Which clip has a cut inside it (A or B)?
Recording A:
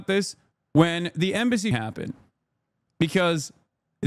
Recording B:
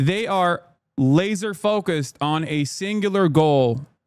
A